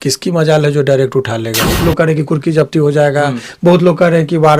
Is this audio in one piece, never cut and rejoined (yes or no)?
no